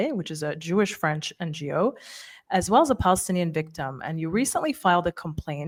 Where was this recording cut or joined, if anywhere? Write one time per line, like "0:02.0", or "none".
none